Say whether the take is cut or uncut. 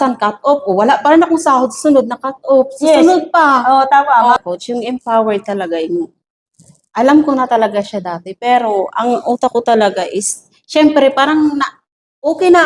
cut